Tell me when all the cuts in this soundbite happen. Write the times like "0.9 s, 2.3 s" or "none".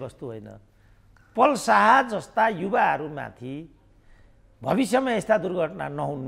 none

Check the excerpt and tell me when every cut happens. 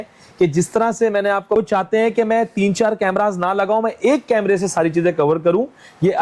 1.6 s

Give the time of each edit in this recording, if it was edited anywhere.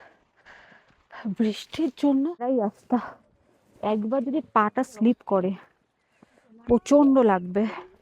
2.6 s

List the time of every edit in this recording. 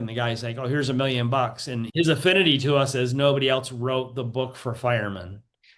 1.8 s

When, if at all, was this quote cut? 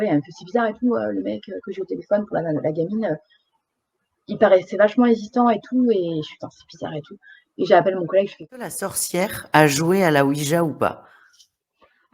8.7 s

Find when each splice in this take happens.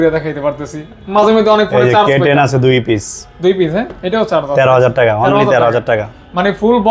none

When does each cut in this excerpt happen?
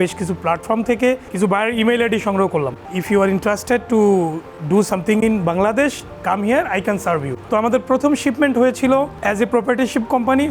1.3 s, 2.9 s, 7.3 s, 9.2 s

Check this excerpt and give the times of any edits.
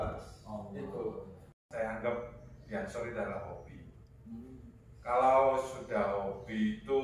1.6 s

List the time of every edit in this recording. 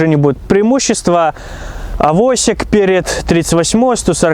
none

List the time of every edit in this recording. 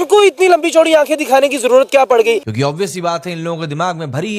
2.5 s

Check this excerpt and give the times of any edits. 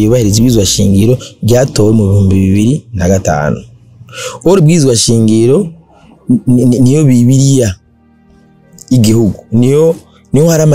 none

